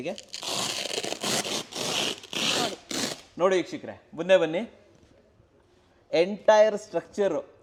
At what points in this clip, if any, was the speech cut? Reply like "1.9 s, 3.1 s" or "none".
none